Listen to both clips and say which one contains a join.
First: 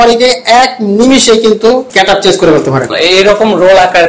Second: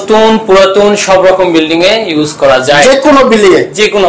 first; 2 cuts; at 1.9 s, 2.9 s

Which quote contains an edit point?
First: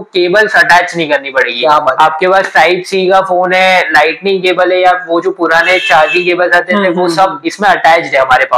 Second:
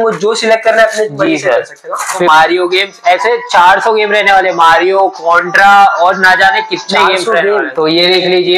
second; 2 cuts; at 2.2 s, 7.7 s

